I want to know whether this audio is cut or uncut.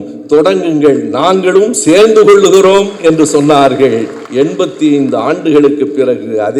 cut